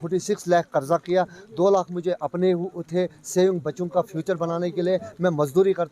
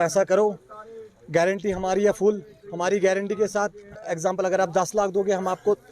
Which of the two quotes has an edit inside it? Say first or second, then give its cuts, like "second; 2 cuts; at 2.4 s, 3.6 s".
second; 1 cut; at 4.0 s